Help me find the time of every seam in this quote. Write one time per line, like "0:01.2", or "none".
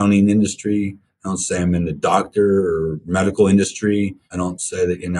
0:04.2